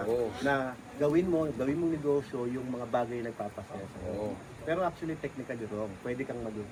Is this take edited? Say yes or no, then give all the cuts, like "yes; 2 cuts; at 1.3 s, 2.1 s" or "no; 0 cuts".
no; 0 cuts